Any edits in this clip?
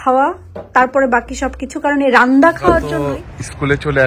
yes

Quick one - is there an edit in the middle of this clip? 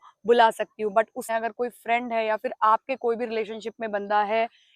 yes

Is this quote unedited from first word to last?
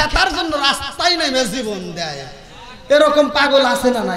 yes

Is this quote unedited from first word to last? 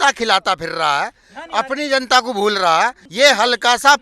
no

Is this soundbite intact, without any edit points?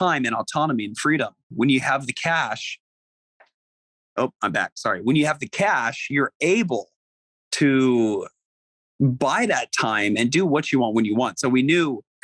yes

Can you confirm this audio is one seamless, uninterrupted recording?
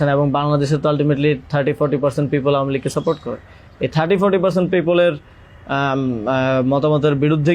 yes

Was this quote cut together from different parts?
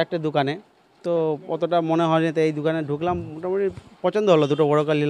no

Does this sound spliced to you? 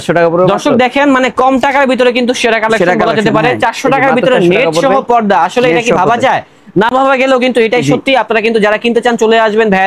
no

